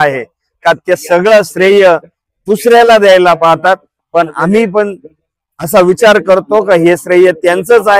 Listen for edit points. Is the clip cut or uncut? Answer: uncut